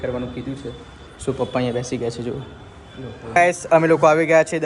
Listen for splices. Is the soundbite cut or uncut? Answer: cut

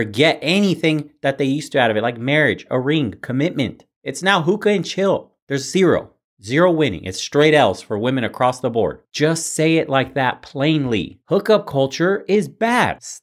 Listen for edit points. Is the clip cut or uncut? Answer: cut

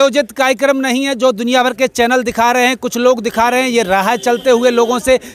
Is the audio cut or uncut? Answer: uncut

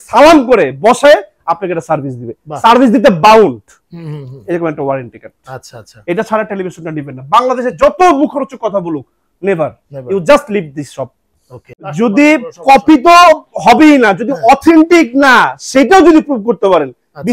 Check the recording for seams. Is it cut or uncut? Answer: cut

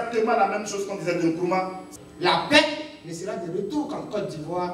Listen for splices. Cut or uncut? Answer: cut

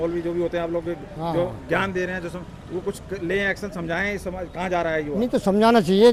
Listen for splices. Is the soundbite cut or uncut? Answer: uncut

